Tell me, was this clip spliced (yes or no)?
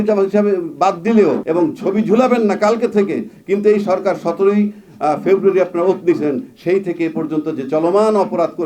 yes